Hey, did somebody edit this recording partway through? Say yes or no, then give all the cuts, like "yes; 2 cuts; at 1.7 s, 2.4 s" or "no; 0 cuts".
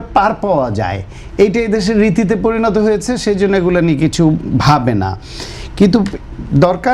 no; 0 cuts